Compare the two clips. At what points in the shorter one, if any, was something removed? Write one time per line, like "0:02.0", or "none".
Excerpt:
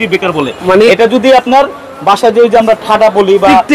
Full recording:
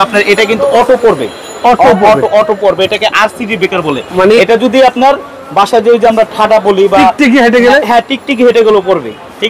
none